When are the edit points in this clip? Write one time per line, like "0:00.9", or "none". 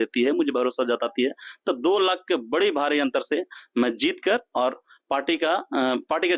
none